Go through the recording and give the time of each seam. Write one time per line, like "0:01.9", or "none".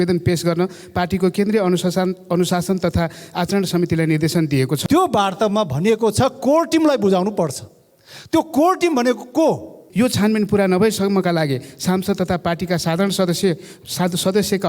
0:04.8
0:09.8